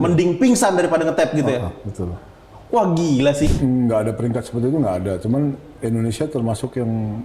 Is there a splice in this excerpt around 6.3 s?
no; 1 cut; at 3.5 s

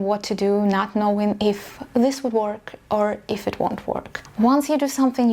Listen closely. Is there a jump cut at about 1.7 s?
no; 1 cut; at 4.2 s

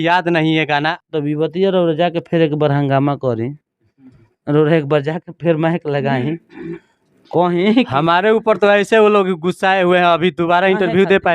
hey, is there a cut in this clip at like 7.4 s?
no; 1 cut; at 1.0 s

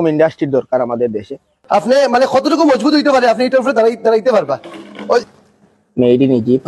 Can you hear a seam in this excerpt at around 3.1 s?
no; 2 cuts; at 1.5 s, 5.3 s

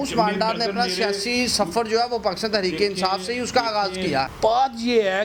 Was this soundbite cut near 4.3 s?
yes; 1 cut; at 4.3 s

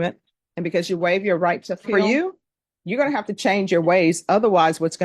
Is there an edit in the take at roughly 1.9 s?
yes; 1 cut; at 1.9 s

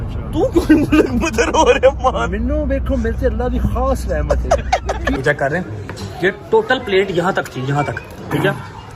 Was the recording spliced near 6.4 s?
no; 1 cut; at 5.2 s

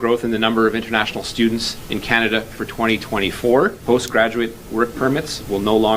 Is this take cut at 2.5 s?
no; 1 cut; at 3.8 s

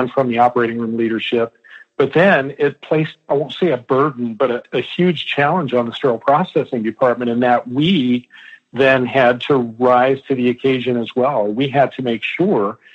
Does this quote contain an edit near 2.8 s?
yes; 2 cuts; at 2.8 s, 4.6 s

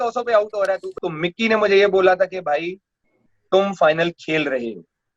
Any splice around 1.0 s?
yes; 1 cut; at 1.0 s

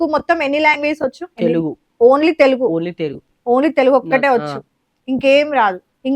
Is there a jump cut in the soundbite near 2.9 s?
no; 1 cut; at 1.2 s

